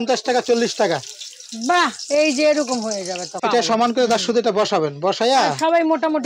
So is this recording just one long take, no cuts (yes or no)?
no